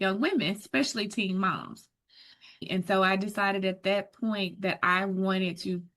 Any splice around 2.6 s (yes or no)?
yes